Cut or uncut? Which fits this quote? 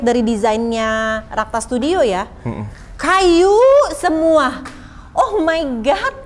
uncut